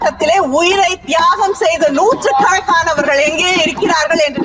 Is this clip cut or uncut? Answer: uncut